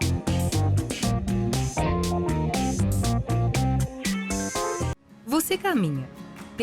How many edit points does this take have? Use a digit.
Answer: 1